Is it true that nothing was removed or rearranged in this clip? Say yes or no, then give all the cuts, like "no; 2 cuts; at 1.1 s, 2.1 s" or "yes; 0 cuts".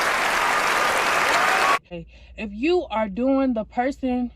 no; 1 cut; at 2.0 s